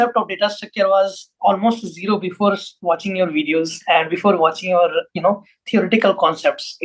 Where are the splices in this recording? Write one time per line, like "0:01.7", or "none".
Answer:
none